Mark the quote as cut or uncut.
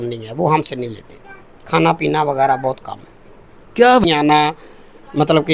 cut